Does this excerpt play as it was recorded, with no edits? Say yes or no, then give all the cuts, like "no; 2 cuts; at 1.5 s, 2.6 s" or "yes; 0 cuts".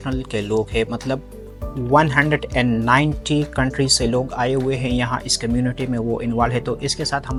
yes; 0 cuts